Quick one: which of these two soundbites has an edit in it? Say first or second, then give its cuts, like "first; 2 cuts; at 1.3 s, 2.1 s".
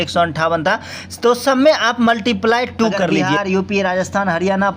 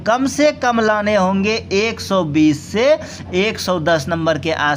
first; 1 cut; at 3.2 s